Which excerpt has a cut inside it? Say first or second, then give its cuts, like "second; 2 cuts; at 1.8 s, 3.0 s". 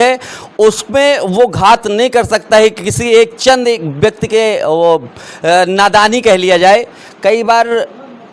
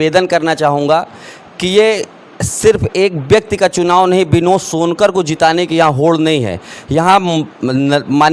first; 1 cut; at 6.9 s